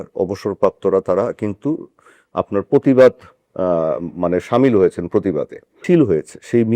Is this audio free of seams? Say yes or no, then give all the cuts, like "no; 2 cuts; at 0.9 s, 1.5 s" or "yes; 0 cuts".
no; 1 cut; at 5.8 s